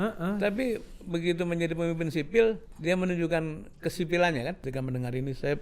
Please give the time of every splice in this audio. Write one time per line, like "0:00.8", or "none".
0:02.7
0:04.6